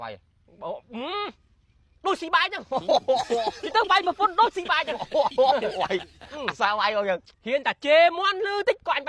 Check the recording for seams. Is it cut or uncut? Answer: cut